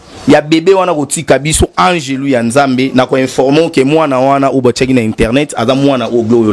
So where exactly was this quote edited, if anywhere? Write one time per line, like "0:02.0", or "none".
none